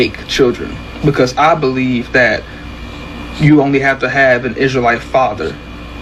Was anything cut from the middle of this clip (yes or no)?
no